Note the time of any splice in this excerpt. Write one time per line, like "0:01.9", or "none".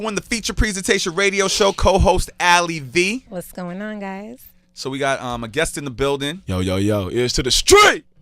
0:06.9